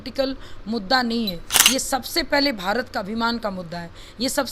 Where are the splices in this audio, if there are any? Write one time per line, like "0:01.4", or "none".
0:01.5